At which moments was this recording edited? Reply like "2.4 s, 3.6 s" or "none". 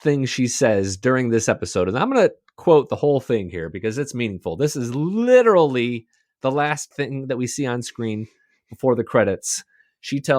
6.9 s